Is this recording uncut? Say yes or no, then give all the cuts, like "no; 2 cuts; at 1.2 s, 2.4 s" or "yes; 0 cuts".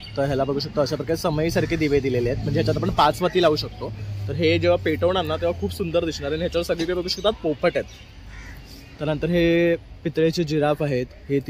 yes; 0 cuts